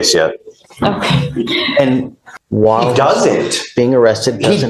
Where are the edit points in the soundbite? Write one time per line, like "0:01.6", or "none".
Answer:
0:02.0